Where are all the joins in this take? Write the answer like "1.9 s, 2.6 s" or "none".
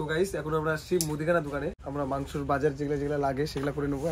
1.8 s